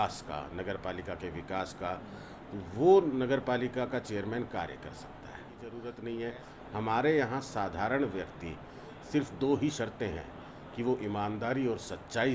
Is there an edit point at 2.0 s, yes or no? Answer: no